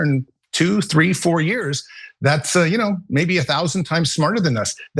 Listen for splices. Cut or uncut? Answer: uncut